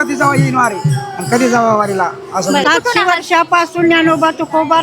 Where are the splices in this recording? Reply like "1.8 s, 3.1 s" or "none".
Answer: 2.6 s